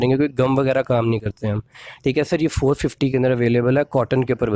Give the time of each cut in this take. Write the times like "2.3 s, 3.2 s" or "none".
none